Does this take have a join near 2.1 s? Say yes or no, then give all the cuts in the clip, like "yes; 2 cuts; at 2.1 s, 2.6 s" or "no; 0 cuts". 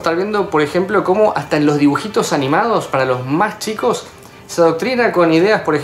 no; 0 cuts